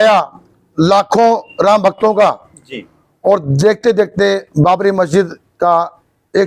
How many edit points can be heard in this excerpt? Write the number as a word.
zero